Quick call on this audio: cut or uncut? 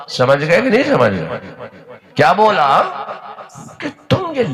uncut